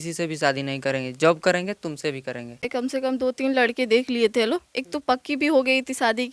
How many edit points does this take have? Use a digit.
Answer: 1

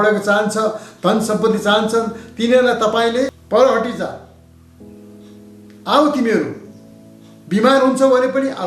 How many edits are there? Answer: 0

